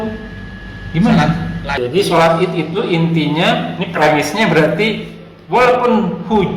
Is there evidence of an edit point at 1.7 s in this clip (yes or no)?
yes